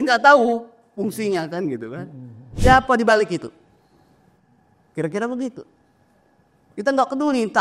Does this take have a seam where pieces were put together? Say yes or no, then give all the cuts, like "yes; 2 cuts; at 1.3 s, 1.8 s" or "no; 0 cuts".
yes; 1 cut; at 2.5 s